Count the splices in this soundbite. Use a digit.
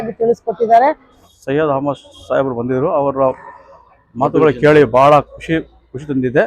1